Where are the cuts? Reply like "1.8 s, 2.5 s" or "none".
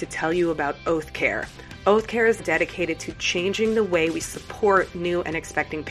2.4 s